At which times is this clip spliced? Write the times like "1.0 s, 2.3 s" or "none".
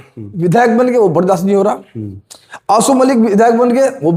none